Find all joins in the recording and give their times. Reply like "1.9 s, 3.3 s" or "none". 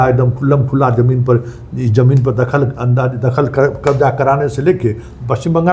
none